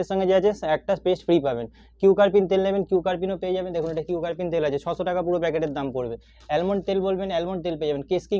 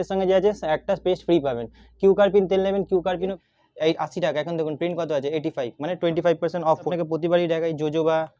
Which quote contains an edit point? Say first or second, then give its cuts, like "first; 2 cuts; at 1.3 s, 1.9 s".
second; 2 cuts; at 3.4 s, 6.9 s